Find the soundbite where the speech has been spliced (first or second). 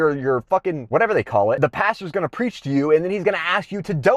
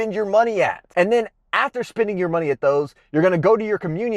first